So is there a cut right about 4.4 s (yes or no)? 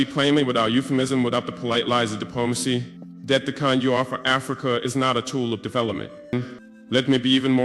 no